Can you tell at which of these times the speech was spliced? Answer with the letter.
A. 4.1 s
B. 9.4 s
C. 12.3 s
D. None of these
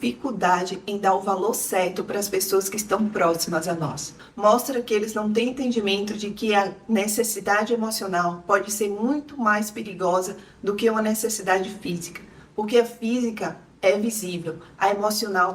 A